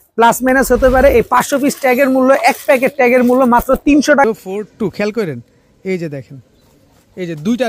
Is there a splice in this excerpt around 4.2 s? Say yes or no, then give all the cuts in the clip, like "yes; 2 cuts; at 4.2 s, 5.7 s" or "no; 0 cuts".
yes; 1 cut; at 4.2 s